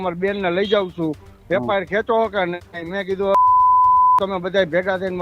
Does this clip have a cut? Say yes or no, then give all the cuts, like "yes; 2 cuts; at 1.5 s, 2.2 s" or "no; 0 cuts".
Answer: no; 0 cuts